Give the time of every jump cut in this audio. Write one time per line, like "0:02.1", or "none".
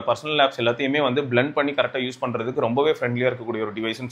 none